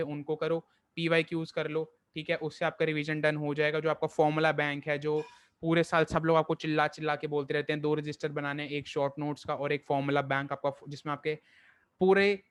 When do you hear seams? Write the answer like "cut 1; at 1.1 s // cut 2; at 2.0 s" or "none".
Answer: none